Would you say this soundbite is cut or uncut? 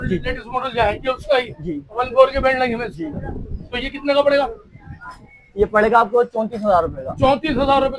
uncut